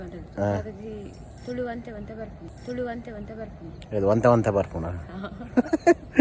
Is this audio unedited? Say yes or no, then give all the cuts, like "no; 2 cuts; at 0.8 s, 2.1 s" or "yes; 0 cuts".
yes; 0 cuts